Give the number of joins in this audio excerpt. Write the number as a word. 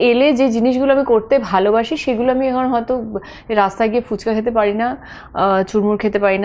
zero